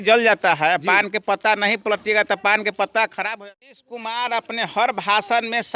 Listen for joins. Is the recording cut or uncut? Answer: cut